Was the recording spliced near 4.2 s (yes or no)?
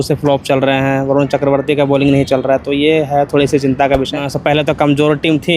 yes